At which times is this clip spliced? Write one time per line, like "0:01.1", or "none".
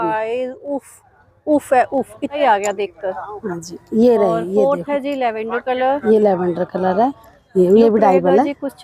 0:02.4
0:07.3